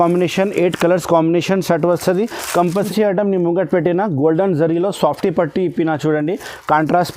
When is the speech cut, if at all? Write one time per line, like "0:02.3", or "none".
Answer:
0:02.8